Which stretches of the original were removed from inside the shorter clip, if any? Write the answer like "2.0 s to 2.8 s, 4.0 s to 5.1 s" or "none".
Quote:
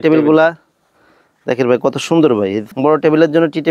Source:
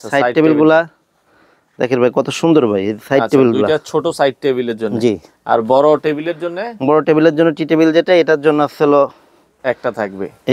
3.0 s to 6.7 s